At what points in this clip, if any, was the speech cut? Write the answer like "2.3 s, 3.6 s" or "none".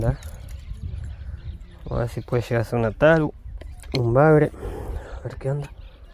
none